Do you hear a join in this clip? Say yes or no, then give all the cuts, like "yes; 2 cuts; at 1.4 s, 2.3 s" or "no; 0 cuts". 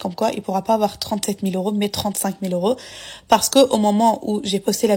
no; 0 cuts